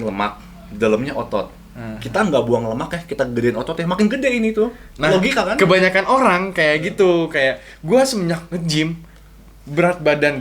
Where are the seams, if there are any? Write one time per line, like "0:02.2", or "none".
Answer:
none